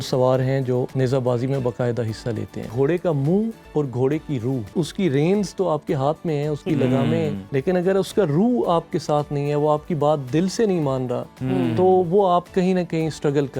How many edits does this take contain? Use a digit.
5